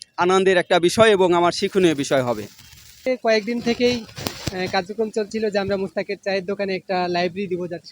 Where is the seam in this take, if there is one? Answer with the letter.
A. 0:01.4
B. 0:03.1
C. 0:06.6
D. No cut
B